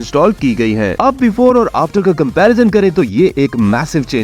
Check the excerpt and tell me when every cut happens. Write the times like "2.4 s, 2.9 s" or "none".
1.0 s